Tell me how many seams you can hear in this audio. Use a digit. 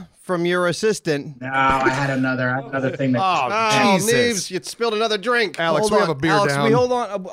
1